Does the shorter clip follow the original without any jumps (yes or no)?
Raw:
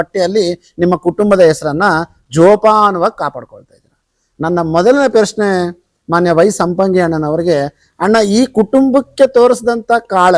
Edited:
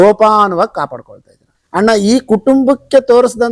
no